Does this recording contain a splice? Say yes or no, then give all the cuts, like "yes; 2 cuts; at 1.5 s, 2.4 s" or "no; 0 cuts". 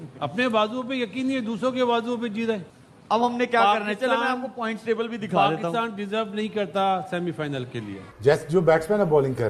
yes; 2 cuts; at 2.7 s, 8.1 s